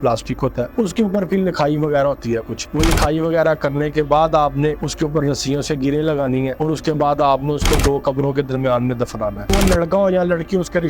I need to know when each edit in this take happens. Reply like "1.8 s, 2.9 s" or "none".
9.5 s